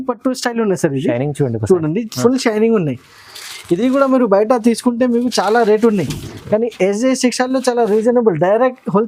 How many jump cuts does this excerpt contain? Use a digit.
0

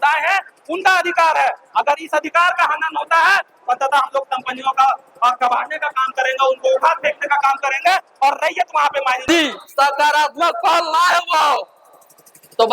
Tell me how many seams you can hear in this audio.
1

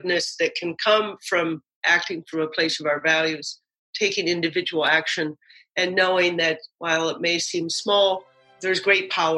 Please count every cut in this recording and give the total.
1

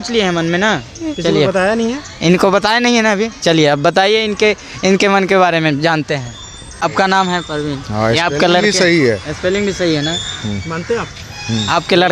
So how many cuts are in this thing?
1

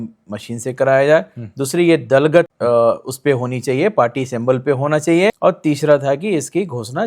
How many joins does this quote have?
2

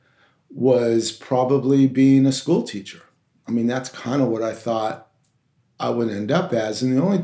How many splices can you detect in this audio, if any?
0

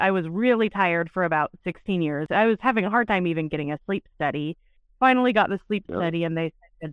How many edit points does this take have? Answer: 1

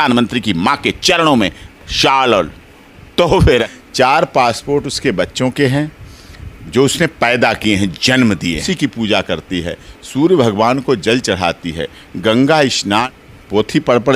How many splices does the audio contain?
3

